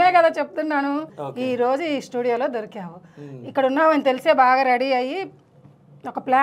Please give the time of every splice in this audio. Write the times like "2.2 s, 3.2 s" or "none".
1.1 s